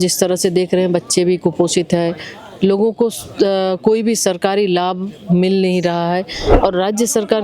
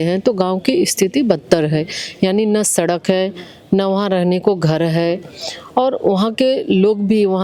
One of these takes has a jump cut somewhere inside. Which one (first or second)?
first